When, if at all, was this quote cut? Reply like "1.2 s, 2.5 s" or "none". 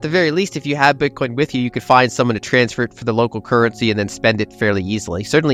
none